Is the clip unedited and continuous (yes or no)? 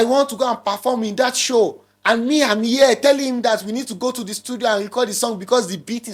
yes